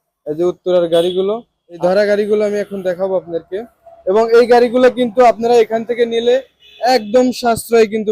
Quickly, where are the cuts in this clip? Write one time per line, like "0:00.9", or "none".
0:01.8